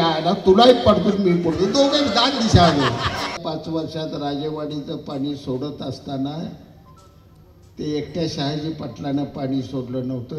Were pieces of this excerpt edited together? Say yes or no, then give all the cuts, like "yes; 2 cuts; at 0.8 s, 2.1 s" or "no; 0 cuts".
no; 0 cuts